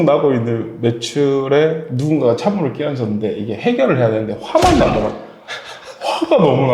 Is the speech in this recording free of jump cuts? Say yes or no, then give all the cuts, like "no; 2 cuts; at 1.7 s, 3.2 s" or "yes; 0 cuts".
yes; 0 cuts